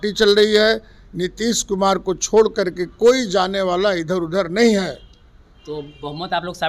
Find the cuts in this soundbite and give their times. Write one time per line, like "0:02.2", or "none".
none